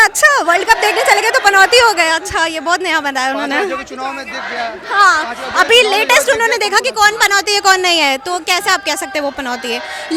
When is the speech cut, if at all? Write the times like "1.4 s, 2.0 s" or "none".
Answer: none